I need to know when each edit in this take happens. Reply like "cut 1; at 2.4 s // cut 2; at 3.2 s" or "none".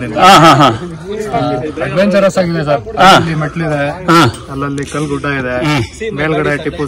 none